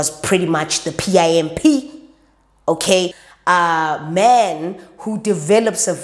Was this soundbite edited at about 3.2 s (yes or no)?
yes